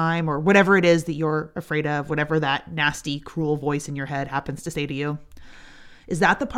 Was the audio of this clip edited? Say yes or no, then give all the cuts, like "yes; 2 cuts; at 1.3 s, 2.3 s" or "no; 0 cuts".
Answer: no; 0 cuts